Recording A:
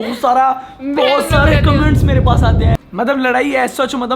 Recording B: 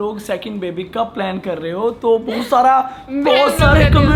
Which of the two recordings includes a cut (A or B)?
A